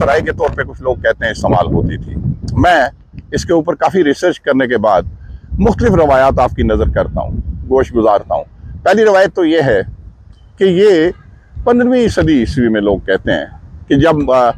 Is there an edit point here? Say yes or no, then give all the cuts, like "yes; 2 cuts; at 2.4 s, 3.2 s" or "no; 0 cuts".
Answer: no; 0 cuts